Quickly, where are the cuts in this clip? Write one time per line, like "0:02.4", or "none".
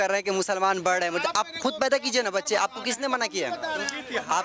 none

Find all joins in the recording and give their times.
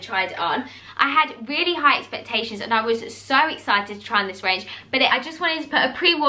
0:00.8
0:05.1

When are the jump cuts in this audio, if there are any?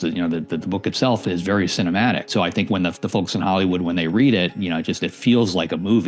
0:02.3

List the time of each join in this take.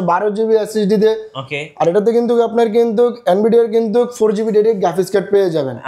none

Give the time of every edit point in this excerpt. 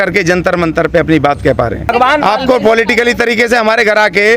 0:01.8

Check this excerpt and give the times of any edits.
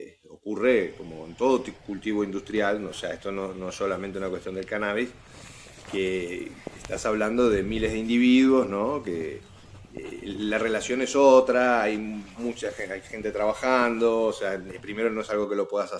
none

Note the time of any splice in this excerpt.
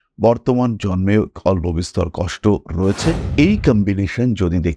0:03.2

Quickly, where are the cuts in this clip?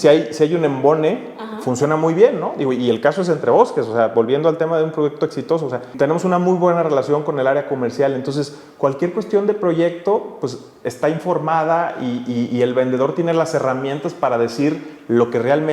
0:05.9

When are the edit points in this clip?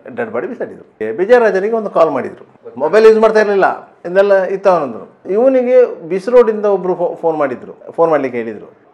0:01.0

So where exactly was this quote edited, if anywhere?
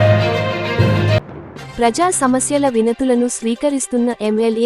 0:01.2

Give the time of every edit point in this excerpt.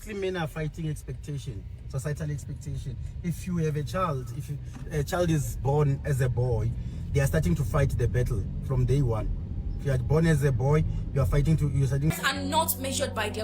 0:12.1

